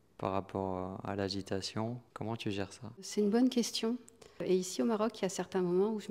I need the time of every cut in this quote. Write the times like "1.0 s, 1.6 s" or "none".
2.1 s, 3.1 s, 4.4 s